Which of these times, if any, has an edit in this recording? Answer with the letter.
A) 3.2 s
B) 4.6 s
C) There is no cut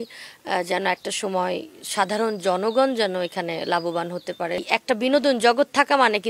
B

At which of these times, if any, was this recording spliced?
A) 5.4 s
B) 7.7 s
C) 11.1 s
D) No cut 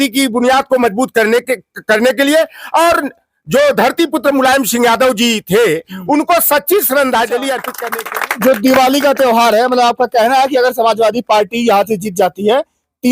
B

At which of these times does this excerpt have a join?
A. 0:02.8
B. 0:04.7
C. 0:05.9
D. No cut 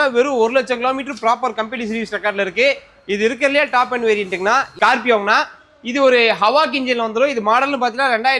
B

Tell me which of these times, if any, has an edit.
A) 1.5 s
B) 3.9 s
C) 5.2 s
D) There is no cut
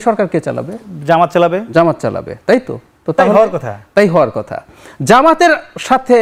D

